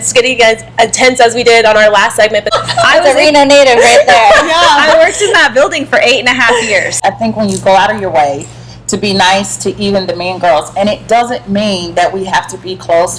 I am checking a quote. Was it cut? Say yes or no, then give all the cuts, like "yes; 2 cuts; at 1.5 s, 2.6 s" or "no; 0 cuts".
yes; 2 cuts; at 2.5 s, 7.0 s